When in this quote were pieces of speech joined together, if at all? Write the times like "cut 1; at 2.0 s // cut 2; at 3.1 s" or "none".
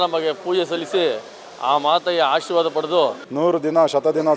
cut 1; at 3.2 s